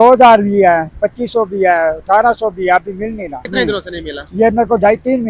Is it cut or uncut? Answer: cut